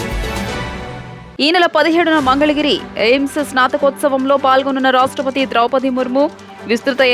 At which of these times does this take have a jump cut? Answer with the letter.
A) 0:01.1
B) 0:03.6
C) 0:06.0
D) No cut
A